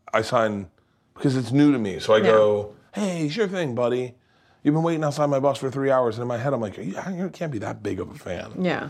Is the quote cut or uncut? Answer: uncut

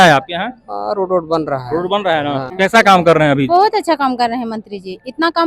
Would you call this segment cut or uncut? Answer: cut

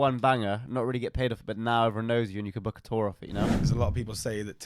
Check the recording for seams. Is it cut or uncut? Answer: cut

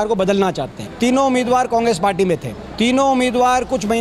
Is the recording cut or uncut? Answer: cut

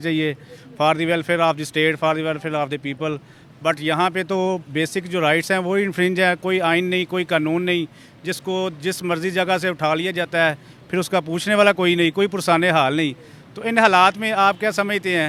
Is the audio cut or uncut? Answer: uncut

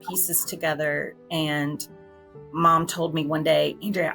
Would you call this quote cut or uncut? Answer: uncut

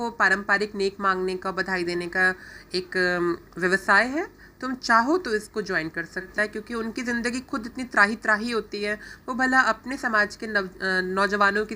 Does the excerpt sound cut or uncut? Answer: cut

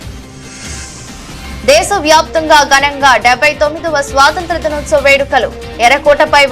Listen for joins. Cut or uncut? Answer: cut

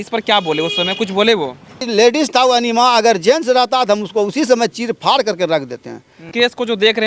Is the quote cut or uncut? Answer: cut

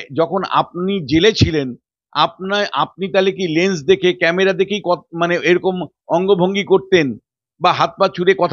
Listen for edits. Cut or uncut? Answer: uncut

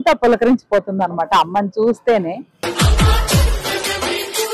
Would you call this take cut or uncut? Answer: uncut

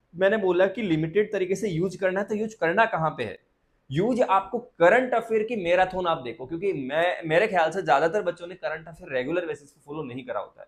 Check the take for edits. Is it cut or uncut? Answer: uncut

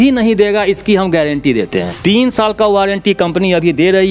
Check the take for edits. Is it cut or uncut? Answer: cut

